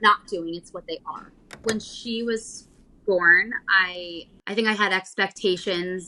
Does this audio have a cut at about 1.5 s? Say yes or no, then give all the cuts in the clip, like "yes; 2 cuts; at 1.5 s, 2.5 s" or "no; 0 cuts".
yes; 1 cut; at 1.5 s